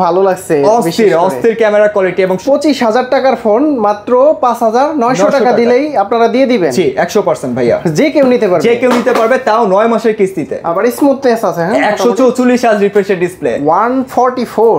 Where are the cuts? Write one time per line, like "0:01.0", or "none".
0:02.4
0:10.6